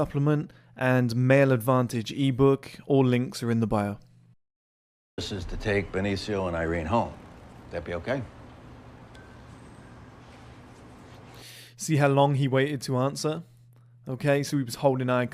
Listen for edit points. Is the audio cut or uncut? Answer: cut